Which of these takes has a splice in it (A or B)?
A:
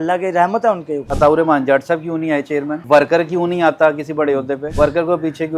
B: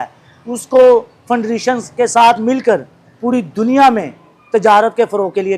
A